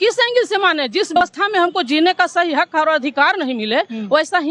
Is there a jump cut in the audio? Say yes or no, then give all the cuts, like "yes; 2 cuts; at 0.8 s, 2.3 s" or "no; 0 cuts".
yes; 1 cut; at 1.2 s